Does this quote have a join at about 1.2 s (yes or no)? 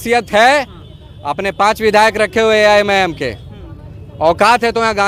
no